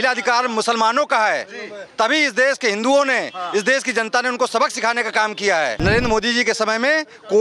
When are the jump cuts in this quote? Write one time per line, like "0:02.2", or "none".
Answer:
0:05.8